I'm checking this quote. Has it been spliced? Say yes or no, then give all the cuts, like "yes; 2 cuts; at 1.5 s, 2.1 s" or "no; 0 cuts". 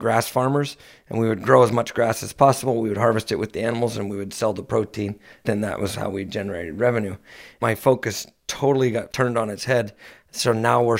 yes; 3 cuts; at 5.5 s, 7.5 s, 9.1 s